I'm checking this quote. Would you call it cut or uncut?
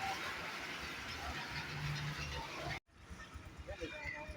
cut